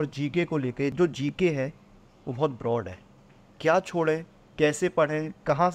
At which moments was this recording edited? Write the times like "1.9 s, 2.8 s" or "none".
0.9 s